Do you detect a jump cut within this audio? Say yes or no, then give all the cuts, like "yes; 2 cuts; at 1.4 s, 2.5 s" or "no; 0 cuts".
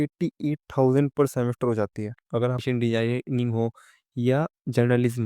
yes; 1 cut; at 2.6 s